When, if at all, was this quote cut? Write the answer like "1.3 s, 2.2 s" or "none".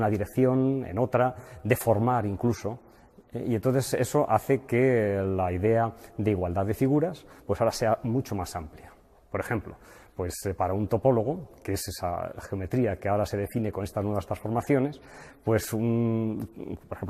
7.9 s